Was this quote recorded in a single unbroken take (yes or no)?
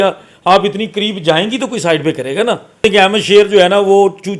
no